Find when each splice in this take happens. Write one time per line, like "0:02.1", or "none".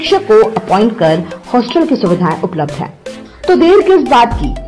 none